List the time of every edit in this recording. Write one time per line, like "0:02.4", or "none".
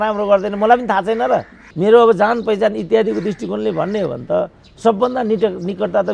0:01.6